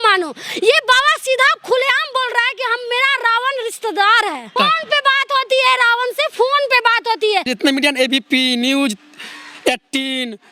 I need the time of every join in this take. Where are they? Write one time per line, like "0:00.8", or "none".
0:04.5
0:07.5